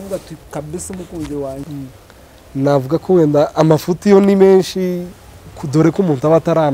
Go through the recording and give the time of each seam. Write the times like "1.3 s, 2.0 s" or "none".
1.6 s